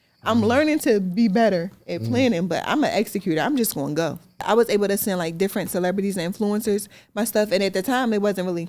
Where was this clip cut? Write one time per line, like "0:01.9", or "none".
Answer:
0:04.4